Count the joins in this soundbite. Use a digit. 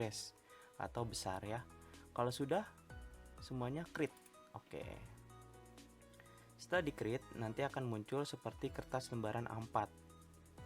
3